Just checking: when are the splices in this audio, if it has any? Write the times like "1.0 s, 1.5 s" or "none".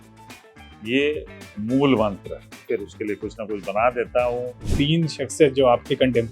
2.5 s, 4.7 s